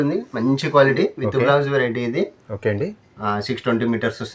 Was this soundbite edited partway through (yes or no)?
yes